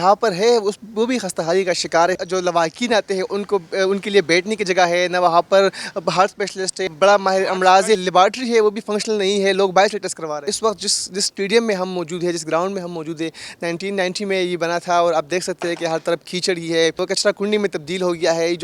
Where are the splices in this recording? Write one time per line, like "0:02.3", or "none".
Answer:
0:02.2
0:06.8
0:08.0
0:10.5
0:17.0